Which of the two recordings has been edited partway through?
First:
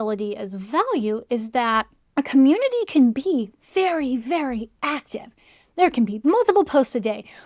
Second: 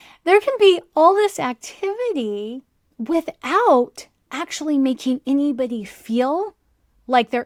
first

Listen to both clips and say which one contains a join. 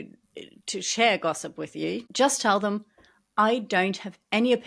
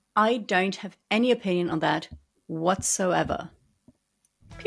first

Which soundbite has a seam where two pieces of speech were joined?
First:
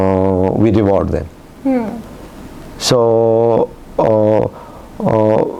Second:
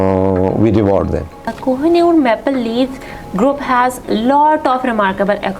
second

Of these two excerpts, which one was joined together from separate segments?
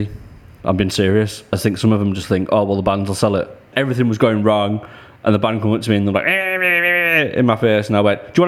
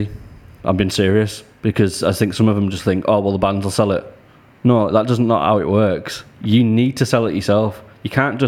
first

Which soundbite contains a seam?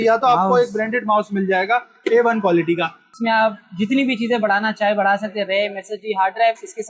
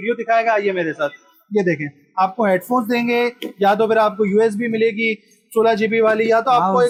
first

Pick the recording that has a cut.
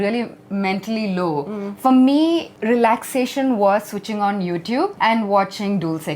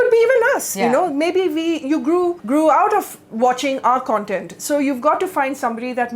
first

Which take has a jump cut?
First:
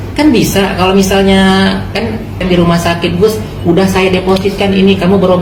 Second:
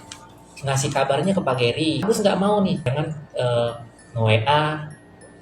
second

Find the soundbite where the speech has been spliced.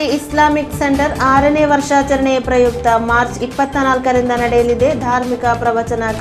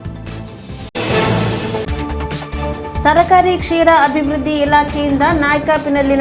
second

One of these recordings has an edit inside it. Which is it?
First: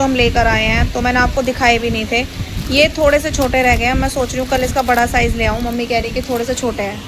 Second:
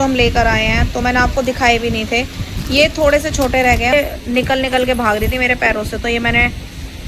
second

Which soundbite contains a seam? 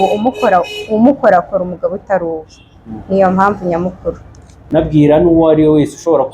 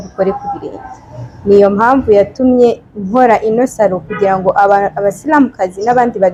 first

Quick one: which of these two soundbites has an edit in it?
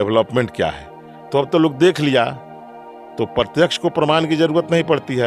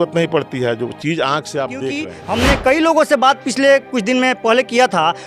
second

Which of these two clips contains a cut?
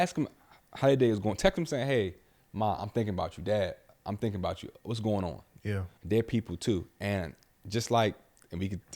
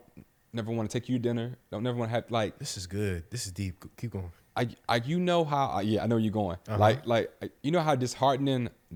first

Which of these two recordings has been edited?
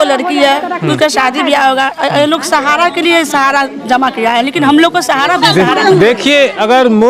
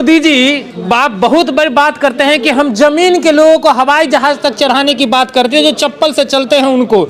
first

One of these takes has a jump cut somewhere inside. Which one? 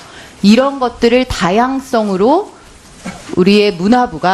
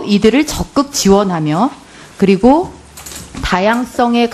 second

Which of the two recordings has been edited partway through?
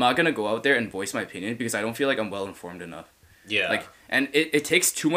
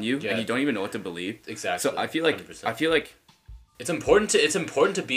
second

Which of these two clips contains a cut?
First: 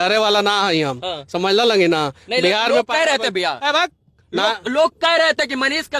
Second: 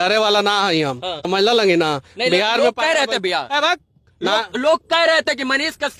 second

